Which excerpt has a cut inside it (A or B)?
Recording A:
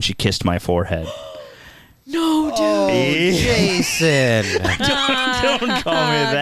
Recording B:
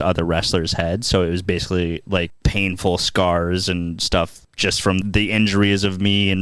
B